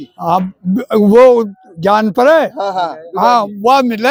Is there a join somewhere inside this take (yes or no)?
no